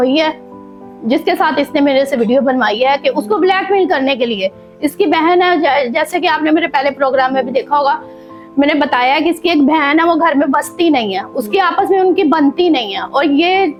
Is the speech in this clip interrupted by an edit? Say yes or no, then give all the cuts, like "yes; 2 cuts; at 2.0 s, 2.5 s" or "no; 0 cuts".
no; 0 cuts